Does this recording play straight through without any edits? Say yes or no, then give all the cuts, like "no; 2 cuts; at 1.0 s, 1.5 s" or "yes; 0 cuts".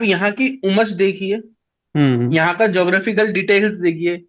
yes; 0 cuts